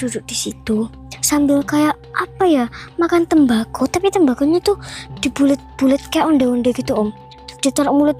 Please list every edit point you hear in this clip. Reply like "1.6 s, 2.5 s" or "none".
none

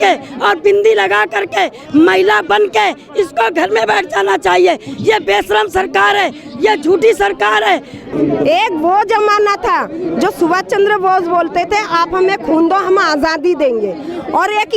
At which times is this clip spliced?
8.1 s

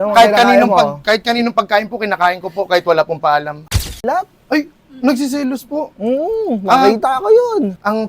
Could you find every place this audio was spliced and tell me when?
4.0 s

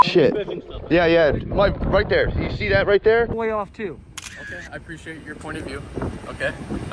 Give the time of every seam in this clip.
3.3 s

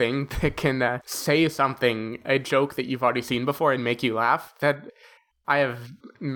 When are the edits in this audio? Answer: 1.1 s

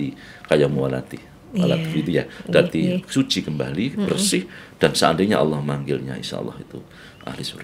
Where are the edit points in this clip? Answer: none

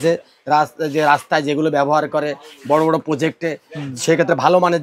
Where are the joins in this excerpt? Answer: none

